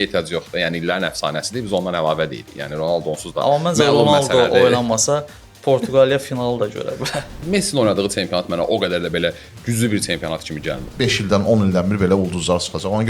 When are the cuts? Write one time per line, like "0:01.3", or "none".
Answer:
0:07.4
0:10.9